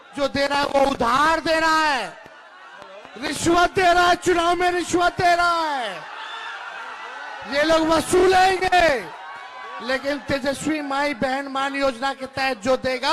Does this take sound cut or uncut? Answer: uncut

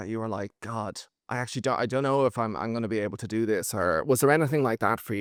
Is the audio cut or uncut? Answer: uncut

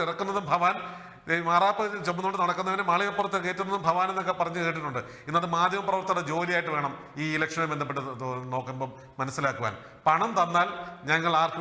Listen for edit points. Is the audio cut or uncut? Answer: uncut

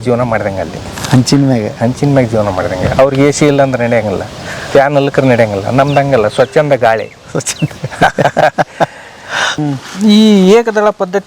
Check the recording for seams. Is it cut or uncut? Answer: cut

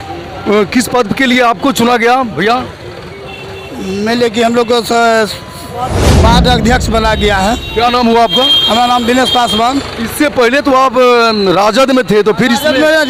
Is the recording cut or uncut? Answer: uncut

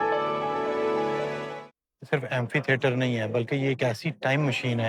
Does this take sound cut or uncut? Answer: cut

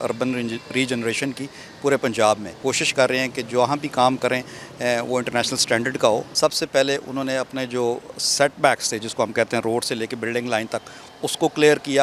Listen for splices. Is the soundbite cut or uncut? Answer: cut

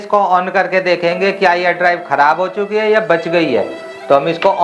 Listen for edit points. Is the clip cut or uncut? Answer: uncut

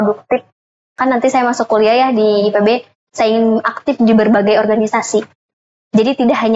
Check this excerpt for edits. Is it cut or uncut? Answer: cut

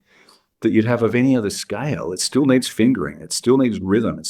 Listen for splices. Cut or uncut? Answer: uncut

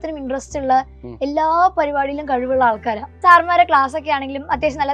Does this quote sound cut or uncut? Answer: cut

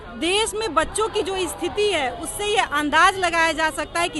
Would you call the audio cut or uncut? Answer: uncut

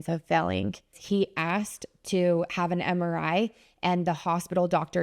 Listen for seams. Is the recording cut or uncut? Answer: cut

